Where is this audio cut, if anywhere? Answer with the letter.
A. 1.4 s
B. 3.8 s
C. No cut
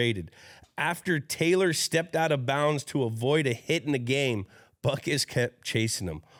C